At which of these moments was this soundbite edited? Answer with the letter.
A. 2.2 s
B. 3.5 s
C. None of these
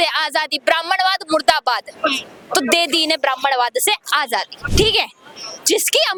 C